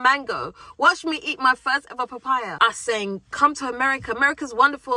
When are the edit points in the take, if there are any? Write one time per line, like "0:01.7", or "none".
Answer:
0:02.5